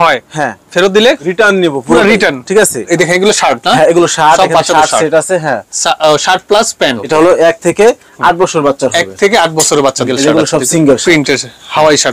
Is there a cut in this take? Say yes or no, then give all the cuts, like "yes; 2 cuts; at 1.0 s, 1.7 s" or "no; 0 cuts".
yes; 4 cuts; at 1.2 s, 2.9 s, 7.0 s, 10.1 s